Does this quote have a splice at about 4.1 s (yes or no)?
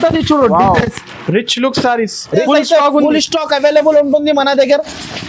no